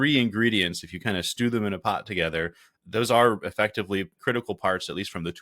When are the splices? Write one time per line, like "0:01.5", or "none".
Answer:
0:02.8
0:04.2